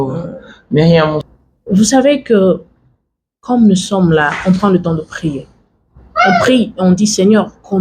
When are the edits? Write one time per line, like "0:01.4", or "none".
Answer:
0:01.3